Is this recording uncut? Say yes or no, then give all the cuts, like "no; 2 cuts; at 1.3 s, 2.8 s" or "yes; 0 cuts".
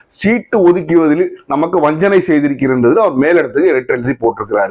yes; 0 cuts